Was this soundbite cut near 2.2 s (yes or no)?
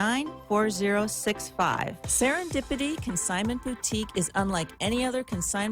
yes